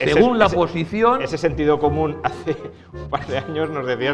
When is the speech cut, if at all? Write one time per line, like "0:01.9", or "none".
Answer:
none

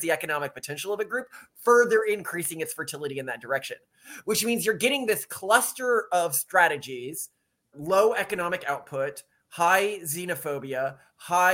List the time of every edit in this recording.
0:07.7

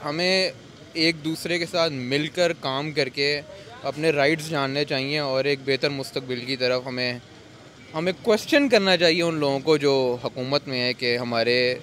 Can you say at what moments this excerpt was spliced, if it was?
none

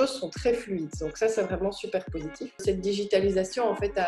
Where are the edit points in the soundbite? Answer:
0:02.6

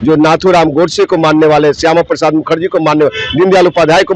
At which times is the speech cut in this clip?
none

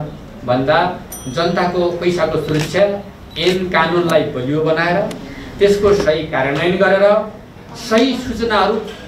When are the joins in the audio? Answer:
none

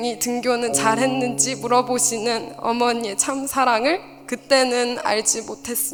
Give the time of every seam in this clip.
none

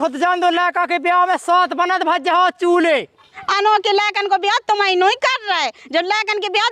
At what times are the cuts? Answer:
0:03.2

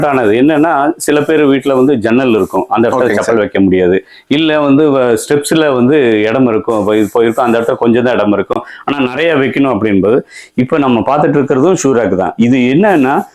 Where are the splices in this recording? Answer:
none

